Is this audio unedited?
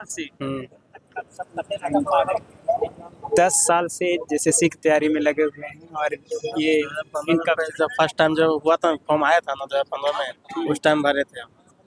yes; 0 cuts

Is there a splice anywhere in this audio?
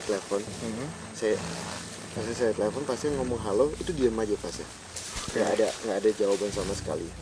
no; 0 cuts

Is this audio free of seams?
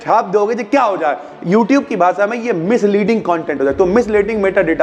yes; 0 cuts

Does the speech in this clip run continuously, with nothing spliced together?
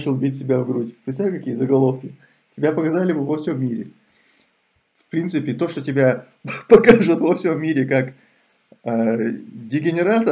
yes; 0 cuts

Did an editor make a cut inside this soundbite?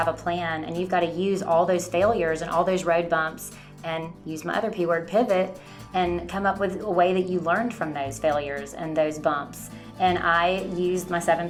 no; 0 cuts

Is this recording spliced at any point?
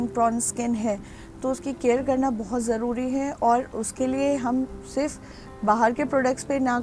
no; 0 cuts

